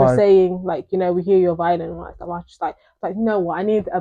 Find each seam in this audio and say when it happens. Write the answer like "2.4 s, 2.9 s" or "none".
none

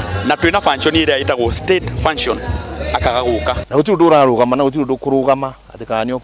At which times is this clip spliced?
3.6 s

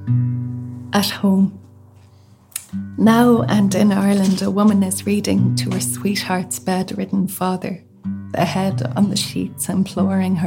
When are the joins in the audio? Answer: 0.9 s

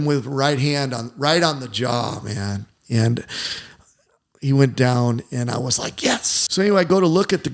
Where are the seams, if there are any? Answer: 6.3 s

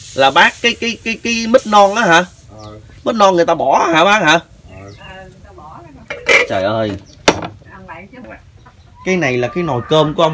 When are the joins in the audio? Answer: 8.2 s

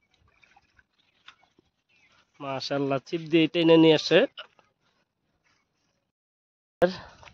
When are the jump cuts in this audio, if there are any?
6.1 s

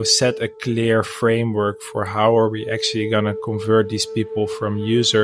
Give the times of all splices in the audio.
none

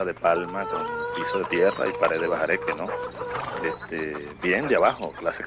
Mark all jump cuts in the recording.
none

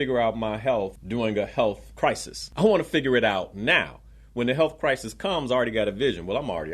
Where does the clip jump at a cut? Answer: 1.0 s, 1.9 s

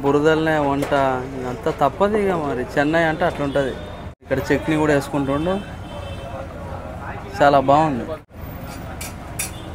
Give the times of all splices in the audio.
4.3 s, 8.3 s

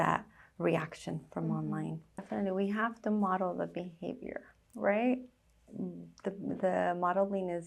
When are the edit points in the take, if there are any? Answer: 2.2 s

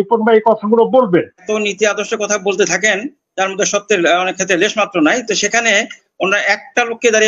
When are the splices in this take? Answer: 1.4 s

